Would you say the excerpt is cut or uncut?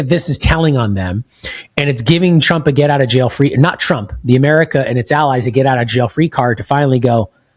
uncut